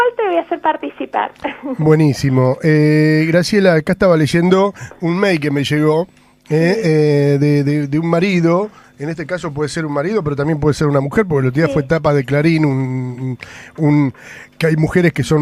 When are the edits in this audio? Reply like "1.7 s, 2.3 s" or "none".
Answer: 9.5 s